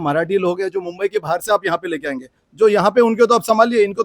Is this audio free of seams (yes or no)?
yes